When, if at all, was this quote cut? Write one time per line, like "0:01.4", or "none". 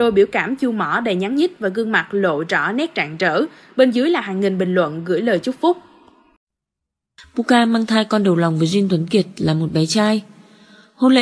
0:06.5

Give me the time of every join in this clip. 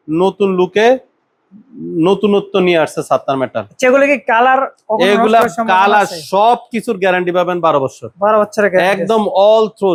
none

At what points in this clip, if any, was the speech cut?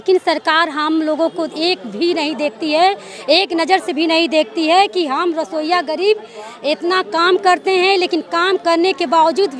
none

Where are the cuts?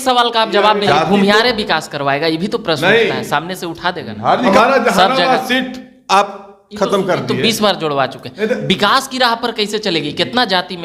0:00.9
0:04.5

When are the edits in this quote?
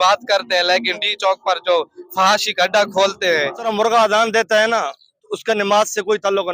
0:03.6

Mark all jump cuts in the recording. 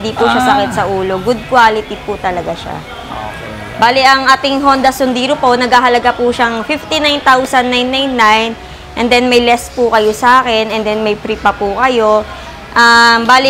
none

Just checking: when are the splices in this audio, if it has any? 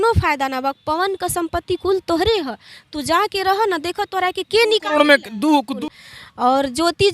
0:05.7

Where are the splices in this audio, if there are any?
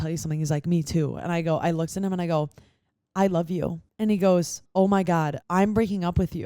0:03.8
0:04.6
0:05.4

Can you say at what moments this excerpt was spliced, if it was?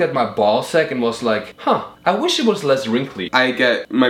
0:01.6
0:03.3

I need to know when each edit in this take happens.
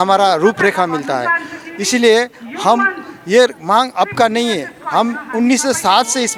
none

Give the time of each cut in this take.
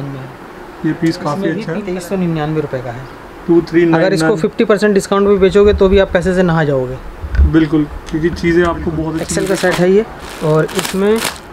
0:01.8
0:09.2

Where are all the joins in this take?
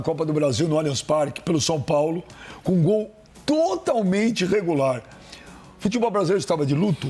none

